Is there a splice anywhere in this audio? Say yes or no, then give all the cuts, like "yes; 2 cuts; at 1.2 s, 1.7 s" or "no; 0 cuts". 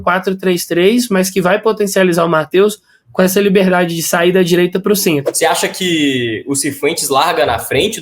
yes; 1 cut; at 5.3 s